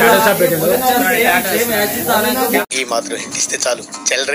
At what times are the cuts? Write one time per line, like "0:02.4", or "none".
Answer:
0:02.7